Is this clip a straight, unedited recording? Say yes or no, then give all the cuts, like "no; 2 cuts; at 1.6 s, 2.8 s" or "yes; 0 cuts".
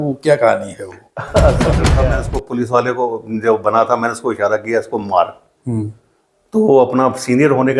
no; 1 cut; at 2.0 s